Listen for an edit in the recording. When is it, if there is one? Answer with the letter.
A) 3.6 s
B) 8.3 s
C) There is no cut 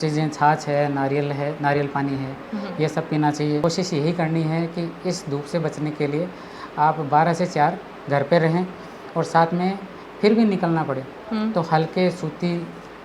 A